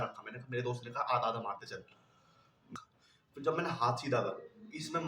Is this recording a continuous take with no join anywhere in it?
no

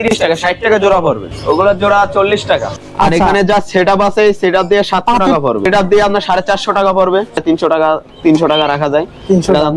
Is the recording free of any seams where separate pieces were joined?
no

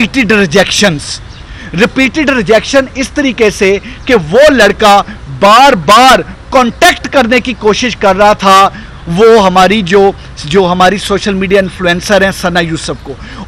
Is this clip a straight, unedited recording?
yes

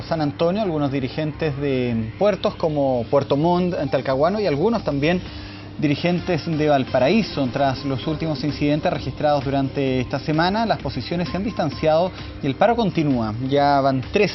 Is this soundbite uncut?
yes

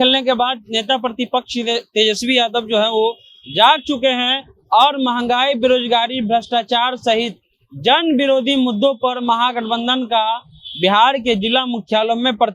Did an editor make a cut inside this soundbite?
no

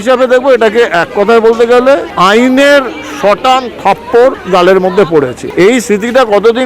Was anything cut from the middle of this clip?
yes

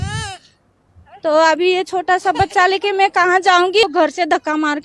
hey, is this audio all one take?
no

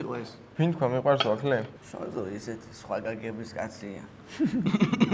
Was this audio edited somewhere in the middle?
yes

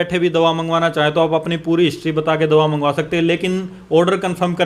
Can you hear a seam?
no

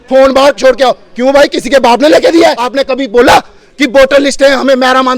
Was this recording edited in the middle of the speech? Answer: yes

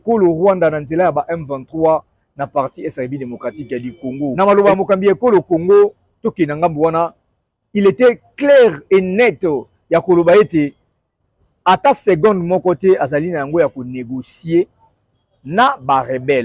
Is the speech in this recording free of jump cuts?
no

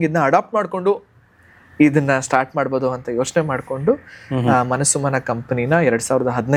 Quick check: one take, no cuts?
yes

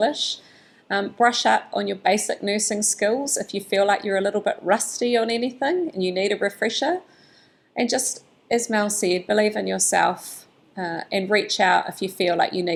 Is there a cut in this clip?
no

